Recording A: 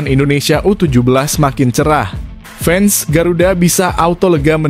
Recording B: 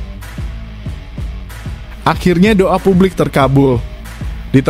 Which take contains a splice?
B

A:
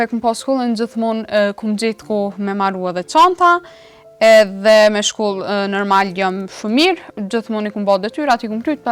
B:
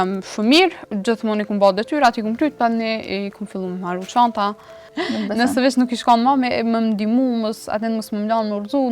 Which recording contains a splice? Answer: B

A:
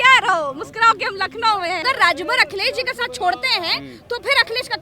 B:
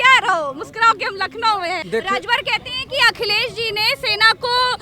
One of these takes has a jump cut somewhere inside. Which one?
B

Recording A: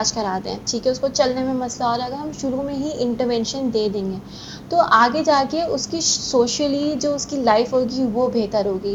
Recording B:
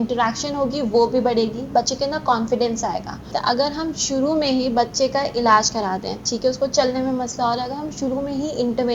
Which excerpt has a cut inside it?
B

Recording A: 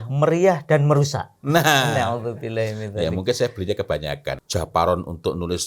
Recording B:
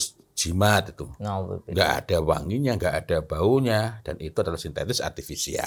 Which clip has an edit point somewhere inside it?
A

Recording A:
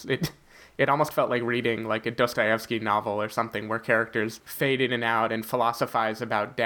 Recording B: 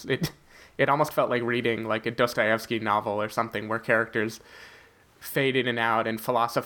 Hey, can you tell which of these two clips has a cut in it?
A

